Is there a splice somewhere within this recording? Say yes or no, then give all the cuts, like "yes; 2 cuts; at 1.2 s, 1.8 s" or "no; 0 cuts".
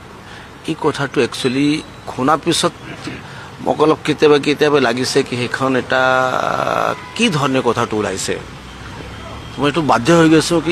no; 0 cuts